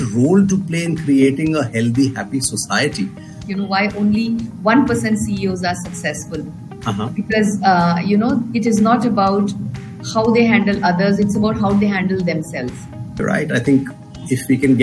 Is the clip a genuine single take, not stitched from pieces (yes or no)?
no